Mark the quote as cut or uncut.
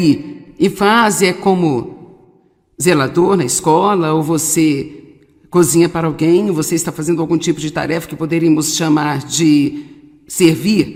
uncut